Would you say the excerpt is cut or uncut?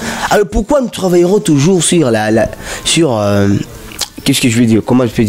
uncut